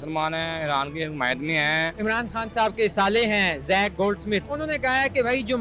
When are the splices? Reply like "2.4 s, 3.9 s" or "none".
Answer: 1.9 s, 4.5 s